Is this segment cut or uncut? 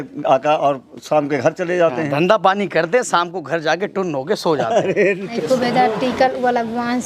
cut